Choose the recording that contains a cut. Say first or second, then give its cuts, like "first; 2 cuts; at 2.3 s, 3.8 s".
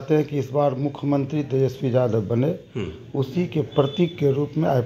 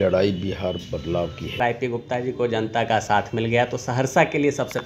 second; 1 cut; at 1.6 s